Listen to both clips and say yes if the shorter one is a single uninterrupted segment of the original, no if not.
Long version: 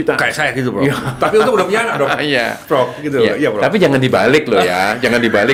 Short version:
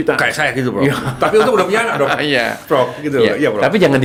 yes